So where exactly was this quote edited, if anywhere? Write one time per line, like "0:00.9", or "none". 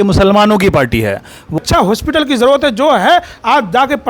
0:01.6